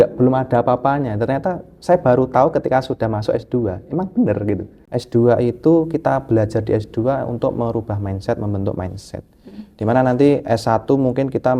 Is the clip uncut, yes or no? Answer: no